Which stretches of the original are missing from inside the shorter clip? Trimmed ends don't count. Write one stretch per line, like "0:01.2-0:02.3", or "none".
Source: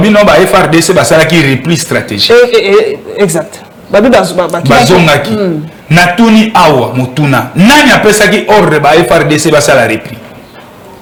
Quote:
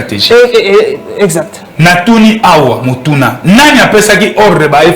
0:03.6-0:05.7